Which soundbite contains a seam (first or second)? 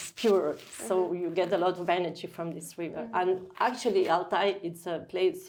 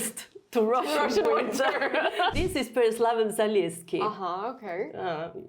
second